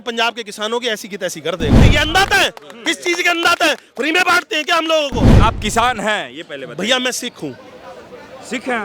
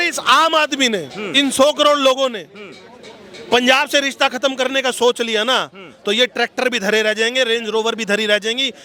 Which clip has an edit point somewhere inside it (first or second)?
first